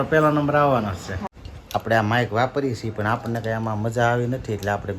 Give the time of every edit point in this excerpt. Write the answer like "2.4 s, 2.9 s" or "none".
1.3 s